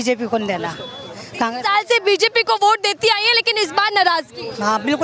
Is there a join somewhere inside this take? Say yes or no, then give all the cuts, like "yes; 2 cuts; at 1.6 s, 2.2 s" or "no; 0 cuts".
no; 0 cuts